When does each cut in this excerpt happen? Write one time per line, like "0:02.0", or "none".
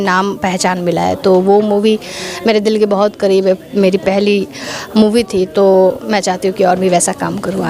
none

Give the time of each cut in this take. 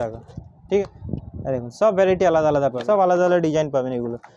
0:00.8
0:02.8

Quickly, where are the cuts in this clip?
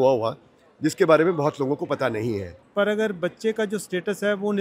0:02.6

